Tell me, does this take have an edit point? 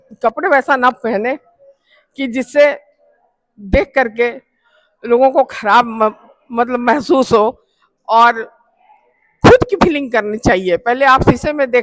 no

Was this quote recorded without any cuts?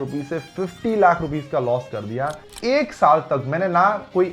no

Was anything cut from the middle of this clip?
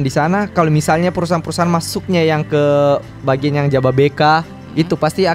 no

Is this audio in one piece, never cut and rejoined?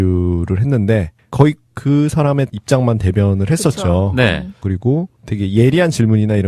yes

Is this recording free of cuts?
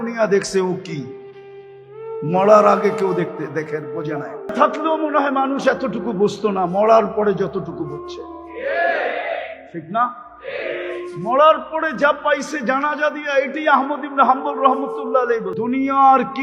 no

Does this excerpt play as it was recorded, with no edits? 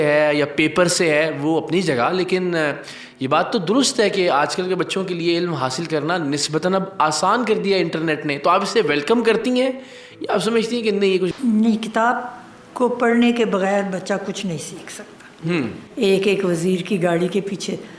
no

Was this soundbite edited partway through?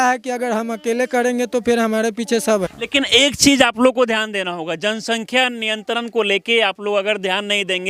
yes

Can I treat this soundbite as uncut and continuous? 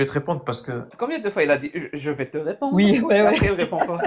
no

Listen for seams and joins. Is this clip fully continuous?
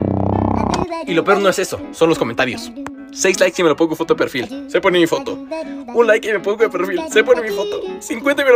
yes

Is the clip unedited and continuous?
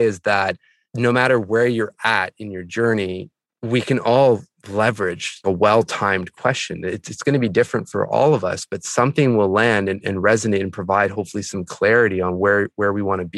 yes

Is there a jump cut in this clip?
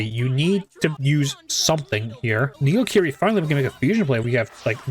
yes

